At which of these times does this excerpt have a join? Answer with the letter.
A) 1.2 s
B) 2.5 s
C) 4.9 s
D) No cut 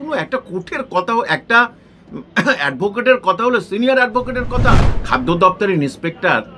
C